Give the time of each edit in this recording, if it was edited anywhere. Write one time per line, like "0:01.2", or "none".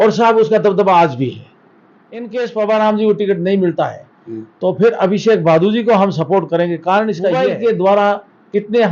0:02.3
0:07.4